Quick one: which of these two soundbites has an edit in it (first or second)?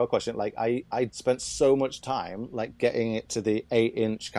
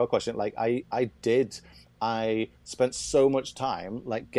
first